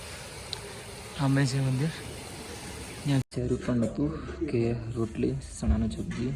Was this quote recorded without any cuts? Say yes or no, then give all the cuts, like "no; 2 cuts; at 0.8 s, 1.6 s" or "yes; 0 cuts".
no; 1 cut; at 3.2 s